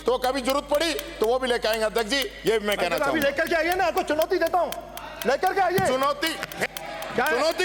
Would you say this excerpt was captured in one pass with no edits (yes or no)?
yes